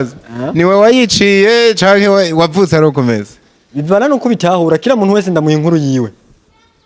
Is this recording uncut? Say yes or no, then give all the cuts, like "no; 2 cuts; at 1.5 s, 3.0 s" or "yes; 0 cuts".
yes; 0 cuts